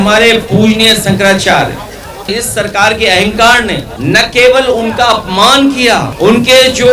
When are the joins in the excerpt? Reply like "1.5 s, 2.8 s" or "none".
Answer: 2.3 s, 3.9 s, 6.1 s

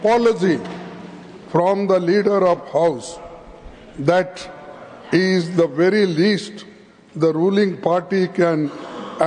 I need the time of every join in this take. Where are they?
none

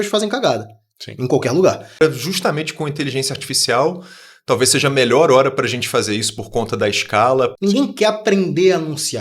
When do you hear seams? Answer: 2.0 s, 7.6 s

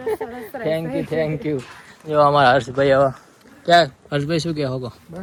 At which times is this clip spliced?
none

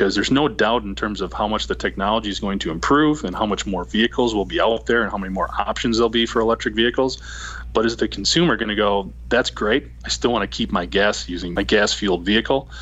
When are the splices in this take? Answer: 11.5 s

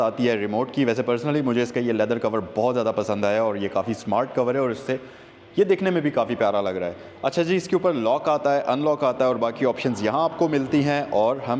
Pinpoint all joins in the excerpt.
none

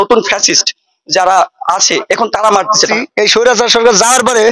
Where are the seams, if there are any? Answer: 2.9 s

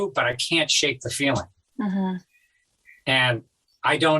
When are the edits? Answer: none

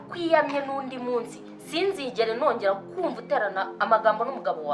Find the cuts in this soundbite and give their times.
none

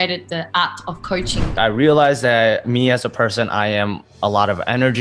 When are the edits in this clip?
1.4 s, 2.6 s

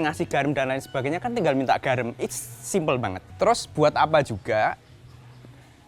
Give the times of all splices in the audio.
3.2 s

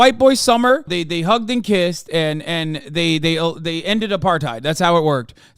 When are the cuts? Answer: 0.9 s

